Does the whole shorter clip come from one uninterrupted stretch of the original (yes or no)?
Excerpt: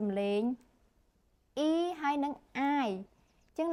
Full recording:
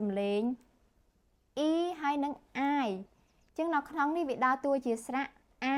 yes